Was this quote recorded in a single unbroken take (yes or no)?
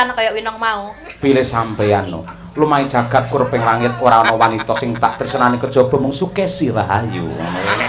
yes